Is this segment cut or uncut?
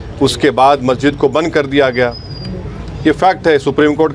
uncut